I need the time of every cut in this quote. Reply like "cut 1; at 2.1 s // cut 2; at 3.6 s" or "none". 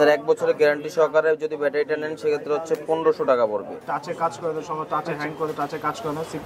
cut 1; at 3.8 s